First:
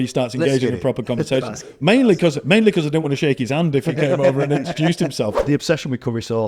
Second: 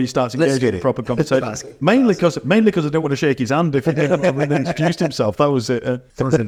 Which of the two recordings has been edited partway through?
first; 1 cut; at 5.3 s

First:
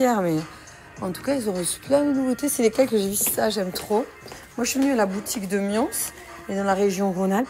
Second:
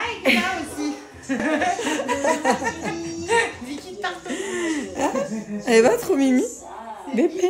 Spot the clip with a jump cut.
second; 1 cut; at 1.4 s

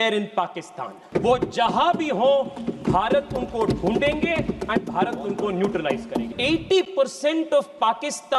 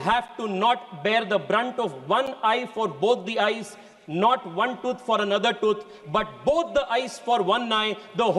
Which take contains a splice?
first; 2 cuts; at 1.0 s, 6.3 s

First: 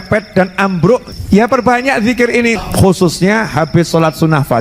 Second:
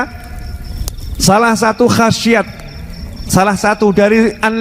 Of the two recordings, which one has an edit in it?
first; 2 cuts; at 1.1 s, 2.6 s

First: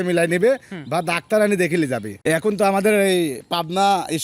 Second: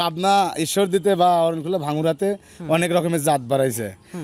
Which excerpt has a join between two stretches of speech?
first; 1 cut; at 2.1 s

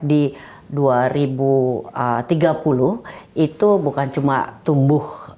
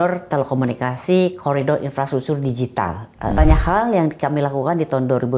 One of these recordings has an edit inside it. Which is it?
second; 1 cut; at 3.3 s

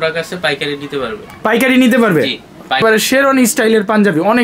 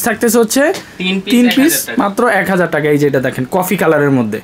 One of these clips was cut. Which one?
first; 1 cut; at 2.8 s

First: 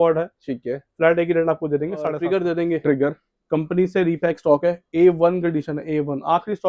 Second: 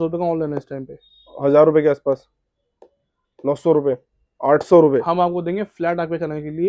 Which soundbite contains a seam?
first; 1 cut; at 2.2 s

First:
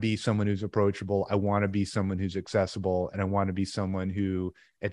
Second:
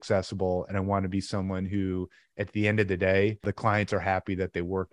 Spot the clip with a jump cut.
second; 1 cut; at 3.5 s

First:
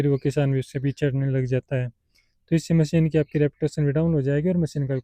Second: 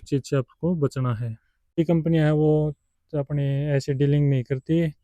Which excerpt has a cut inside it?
second; 1 cut; at 1.8 s

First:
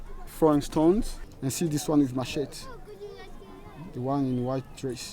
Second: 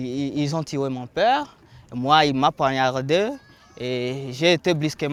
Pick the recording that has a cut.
first; 1 cut; at 1.2 s

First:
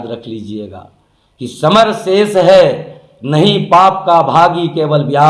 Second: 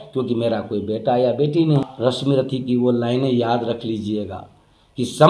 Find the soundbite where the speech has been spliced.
second; 1 cut; at 1.8 s

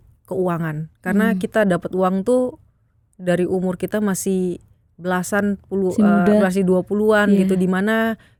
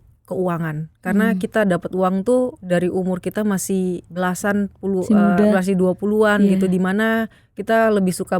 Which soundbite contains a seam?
second; 2 cuts; at 2.6 s, 4.1 s

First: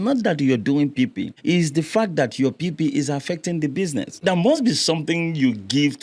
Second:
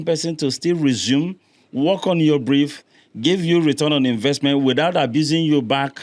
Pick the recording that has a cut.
first; 2 cuts; at 1.3 s, 4.2 s

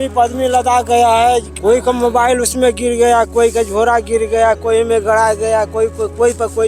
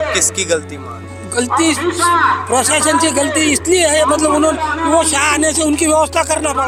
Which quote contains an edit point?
first; 1 cut; at 1.5 s

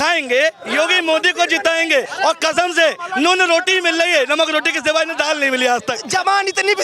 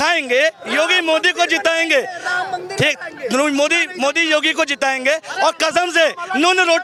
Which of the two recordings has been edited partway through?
first; 2 cuts; at 2.1 s, 6.0 s

